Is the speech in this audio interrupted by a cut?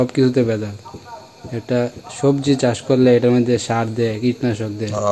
no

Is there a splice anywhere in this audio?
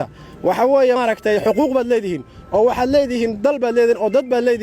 yes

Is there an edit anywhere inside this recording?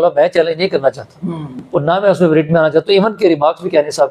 no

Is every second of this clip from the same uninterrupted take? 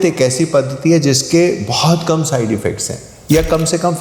yes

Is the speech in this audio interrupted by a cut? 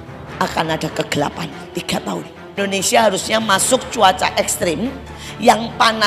yes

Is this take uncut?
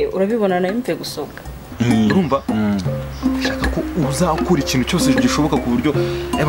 no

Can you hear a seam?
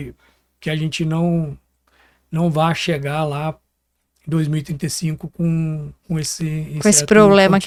no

